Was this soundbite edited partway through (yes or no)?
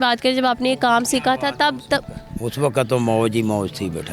no